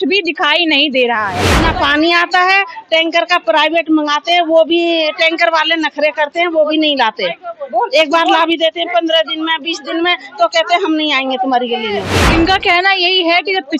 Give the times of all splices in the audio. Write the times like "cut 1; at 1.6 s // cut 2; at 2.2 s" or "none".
cut 1; at 1.6 s // cut 2; at 12.2 s